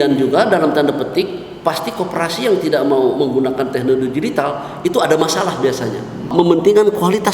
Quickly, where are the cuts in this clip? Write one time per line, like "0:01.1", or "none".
0:06.3